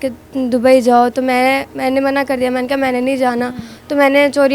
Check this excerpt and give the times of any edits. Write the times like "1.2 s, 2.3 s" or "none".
none